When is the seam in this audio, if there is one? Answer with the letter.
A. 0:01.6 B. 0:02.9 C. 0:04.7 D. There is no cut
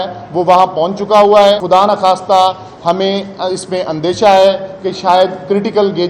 A